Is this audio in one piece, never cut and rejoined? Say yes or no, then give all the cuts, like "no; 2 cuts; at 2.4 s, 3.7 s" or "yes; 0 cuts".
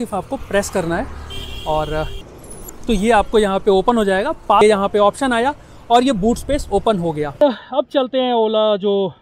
no; 3 cuts; at 2.5 s, 4.6 s, 7.4 s